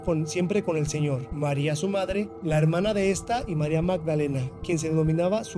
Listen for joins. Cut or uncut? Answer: cut